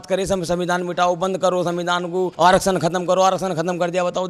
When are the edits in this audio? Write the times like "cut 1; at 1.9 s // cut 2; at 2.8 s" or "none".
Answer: none